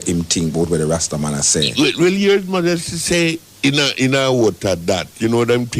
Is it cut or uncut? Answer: cut